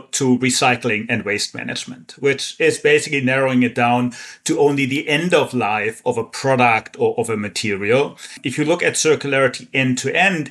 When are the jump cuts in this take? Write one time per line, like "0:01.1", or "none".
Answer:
0:08.4